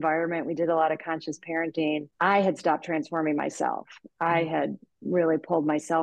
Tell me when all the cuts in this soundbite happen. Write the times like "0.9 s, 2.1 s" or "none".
2.1 s

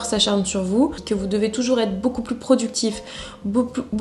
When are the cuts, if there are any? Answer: 1.0 s

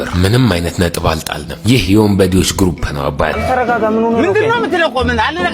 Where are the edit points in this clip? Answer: 3.4 s

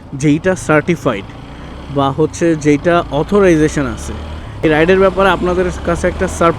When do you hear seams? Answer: 4.6 s

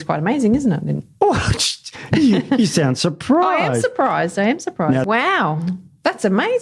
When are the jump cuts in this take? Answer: 5.0 s

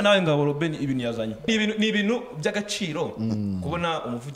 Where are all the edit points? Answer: 1.4 s

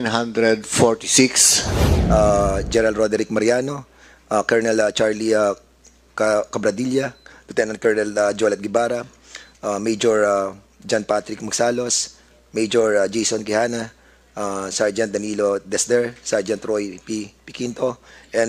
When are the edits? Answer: 2.0 s

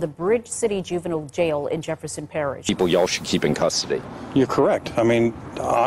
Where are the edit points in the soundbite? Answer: 2.7 s

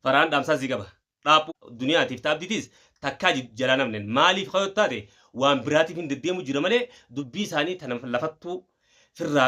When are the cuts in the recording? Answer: 1.5 s

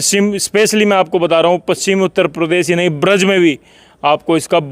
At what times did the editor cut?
none

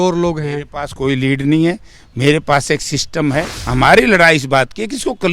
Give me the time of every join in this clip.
3.6 s

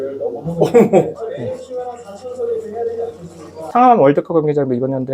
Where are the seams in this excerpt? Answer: 3.6 s

